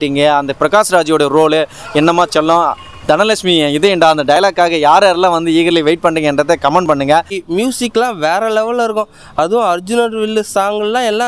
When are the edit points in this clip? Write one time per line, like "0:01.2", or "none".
none